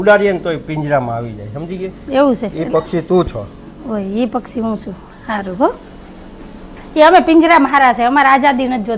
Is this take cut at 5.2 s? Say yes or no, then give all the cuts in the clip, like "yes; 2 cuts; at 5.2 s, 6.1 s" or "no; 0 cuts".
no; 0 cuts